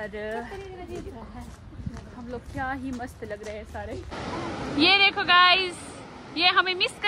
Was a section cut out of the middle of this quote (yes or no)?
yes